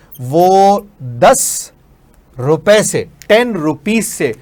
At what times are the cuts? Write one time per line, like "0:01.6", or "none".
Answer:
none